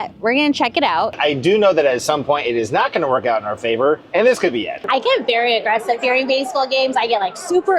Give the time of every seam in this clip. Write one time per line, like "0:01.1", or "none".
0:01.1
0:04.8